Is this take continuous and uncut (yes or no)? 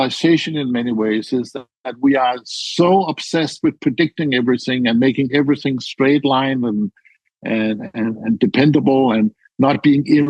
yes